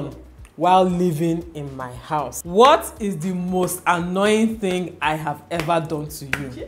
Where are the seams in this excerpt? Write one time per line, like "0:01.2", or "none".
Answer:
0:02.4